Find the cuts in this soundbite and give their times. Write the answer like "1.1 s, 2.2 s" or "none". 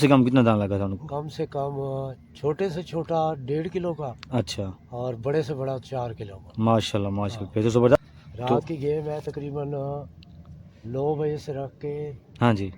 7.9 s

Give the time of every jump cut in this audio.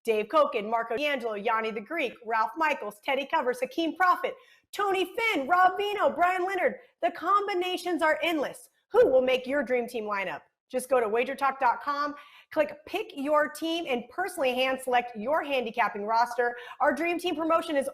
1.0 s

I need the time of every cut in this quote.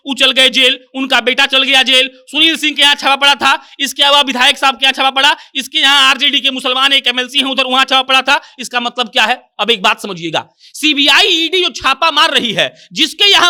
none

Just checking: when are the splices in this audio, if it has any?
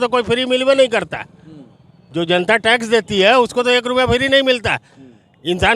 none

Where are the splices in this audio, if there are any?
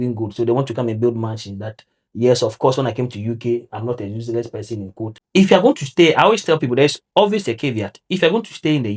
5.3 s

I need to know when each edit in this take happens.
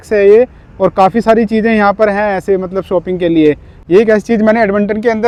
none

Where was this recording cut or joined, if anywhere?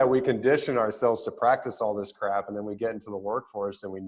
none

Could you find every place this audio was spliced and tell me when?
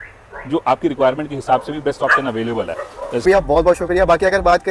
3.2 s

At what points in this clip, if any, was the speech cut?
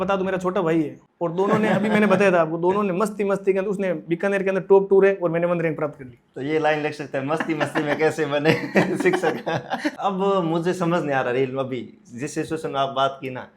1.0 s, 10.0 s

